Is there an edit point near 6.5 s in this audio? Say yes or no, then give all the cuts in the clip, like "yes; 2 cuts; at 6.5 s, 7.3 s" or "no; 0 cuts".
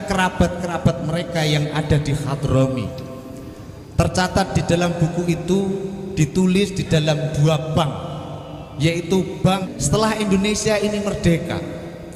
no; 1 cut; at 9.7 s